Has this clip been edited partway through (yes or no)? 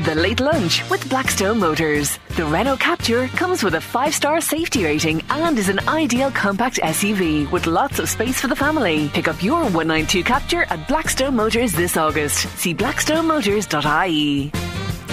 no